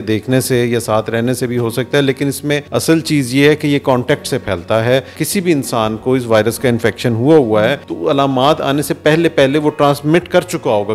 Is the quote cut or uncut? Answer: cut